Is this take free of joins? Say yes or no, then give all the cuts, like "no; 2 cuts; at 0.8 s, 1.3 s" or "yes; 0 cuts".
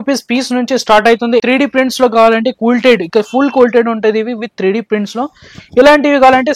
no; 1 cut; at 1.4 s